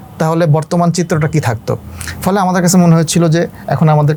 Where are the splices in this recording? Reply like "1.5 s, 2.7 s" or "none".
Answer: none